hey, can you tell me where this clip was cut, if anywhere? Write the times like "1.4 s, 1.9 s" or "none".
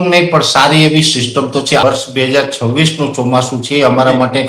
1.8 s